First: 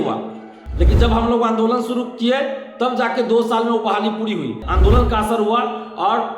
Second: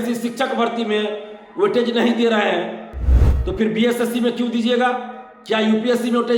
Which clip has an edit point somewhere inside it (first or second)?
first